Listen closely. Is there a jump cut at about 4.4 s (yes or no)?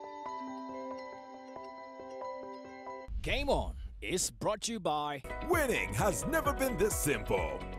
no